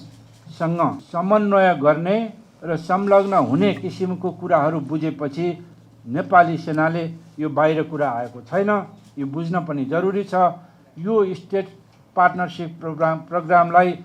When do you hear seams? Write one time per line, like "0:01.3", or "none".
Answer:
0:01.0